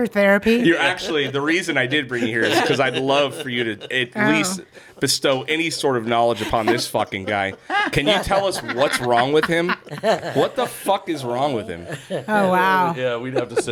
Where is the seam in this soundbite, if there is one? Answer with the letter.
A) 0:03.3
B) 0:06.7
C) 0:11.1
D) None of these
D